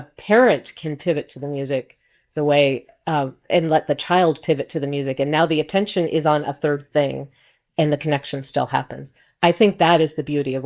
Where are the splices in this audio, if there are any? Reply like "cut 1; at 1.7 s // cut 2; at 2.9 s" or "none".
none